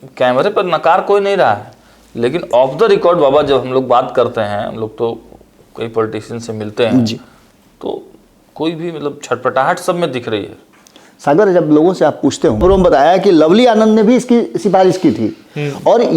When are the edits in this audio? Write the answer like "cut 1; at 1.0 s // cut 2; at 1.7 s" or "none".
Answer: cut 1; at 12.6 s